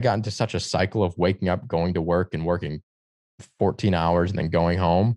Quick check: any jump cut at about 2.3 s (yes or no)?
no